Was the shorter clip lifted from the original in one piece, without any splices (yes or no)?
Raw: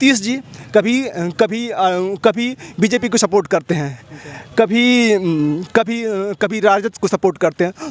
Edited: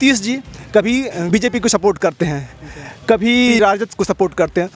no